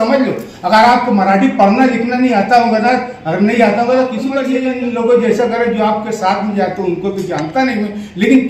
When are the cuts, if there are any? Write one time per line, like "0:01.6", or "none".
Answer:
0:04.4